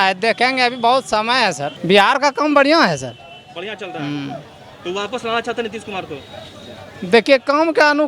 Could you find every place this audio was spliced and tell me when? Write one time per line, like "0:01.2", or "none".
none